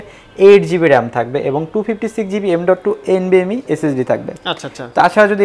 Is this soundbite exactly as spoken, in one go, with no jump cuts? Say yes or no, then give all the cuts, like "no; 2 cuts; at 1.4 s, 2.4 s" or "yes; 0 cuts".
yes; 0 cuts